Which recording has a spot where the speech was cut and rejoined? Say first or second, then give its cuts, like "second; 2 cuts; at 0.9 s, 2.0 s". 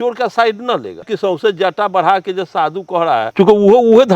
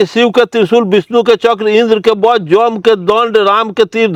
first; 2 cuts; at 1.1 s, 3.3 s